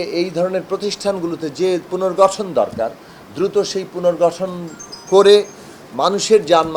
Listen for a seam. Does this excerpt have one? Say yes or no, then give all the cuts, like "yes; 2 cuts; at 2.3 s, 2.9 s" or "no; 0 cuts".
no; 0 cuts